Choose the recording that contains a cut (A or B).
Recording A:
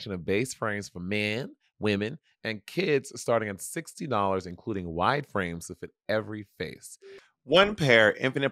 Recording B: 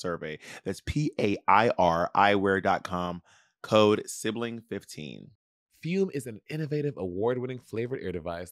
B